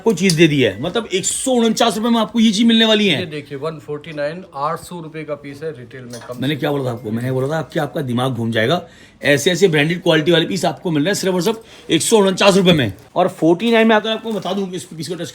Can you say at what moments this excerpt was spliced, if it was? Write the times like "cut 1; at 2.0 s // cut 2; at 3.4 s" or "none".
cut 1; at 13.0 s